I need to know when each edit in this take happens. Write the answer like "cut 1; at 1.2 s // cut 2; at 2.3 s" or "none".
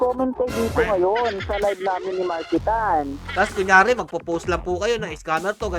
cut 1; at 3.2 s